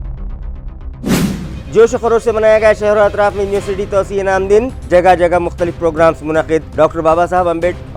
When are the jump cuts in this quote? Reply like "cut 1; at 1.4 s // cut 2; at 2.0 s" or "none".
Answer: cut 1; at 1.1 s